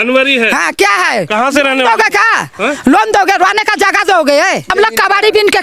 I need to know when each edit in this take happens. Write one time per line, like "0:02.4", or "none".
0:04.7